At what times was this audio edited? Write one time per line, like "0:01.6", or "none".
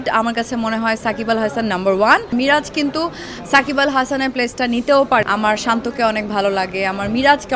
0:02.3
0:05.2